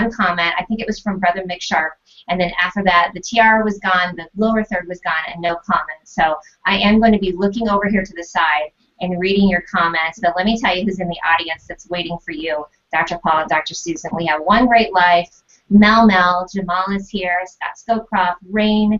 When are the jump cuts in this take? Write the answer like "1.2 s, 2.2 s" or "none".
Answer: none